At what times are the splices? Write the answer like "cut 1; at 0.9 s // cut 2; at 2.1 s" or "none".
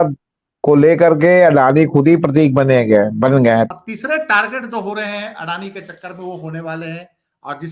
cut 1; at 3.7 s

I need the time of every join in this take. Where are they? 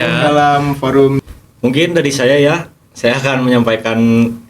cut 1; at 1.2 s

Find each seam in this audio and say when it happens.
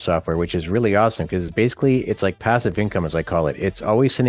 none

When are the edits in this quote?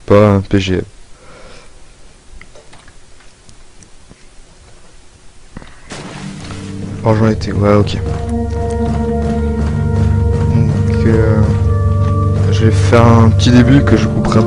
cut 1; at 12.4 s

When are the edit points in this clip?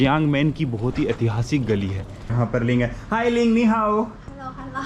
cut 1; at 2.3 s

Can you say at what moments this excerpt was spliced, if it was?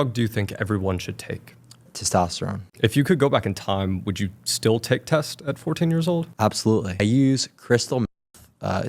cut 1; at 2.6 s // cut 2; at 7.0 s

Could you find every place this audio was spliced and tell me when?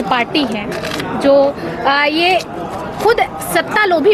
none

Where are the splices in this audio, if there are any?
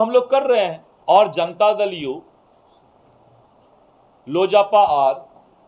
cut 1; at 1.1 s

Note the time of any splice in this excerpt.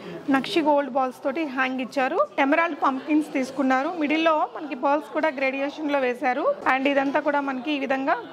cut 1; at 2.3 s // cut 2; at 6.6 s

